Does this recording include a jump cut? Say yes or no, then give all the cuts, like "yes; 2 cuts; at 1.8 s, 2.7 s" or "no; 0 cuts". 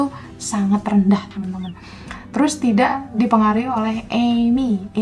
no; 0 cuts